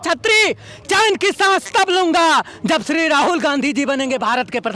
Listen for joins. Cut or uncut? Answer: uncut